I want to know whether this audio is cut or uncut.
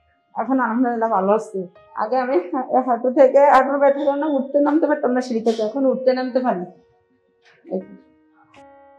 cut